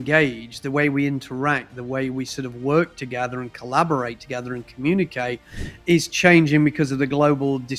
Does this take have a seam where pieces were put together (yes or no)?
no